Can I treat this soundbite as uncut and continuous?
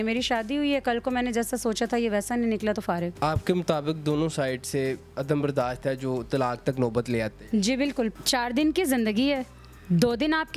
no; 2 cuts; at 3.1 s, 8.1 s

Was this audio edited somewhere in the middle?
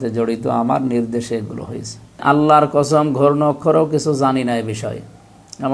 yes; 1 cut; at 2.2 s

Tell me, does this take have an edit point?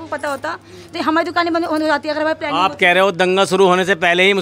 no; 0 cuts

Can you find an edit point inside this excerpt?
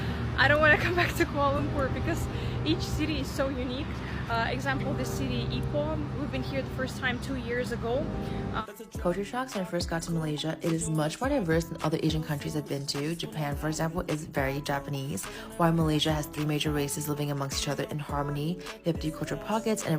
yes; 1 cut; at 8.6 s

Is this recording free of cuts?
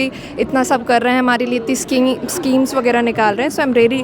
yes; 0 cuts

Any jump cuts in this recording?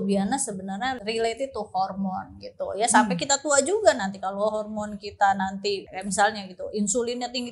yes; 2 cuts; at 1.0 s, 5.8 s

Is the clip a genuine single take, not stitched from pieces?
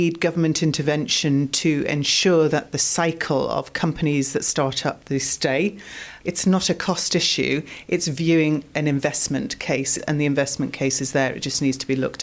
no; 2 cuts; at 6.1 s, 10.0 s

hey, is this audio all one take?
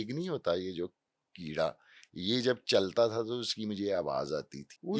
yes; 0 cuts

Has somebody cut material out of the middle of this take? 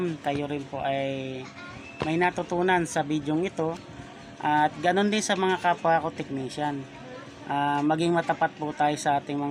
no; 0 cuts

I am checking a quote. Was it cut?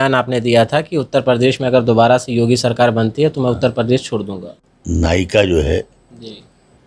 yes; 1 cut; at 4.5 s

